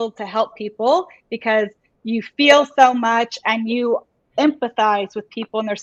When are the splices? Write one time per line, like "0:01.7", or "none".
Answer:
none